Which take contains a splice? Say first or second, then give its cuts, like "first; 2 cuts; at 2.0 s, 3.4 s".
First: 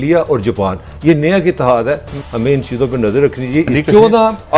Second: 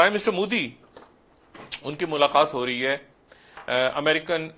first; 2 cuts; at 2.2 s, 3.7 s